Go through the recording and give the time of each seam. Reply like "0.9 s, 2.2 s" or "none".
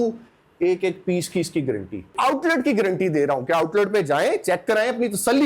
2.1 s